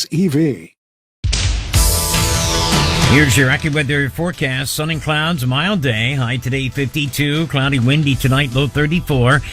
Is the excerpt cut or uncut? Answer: cut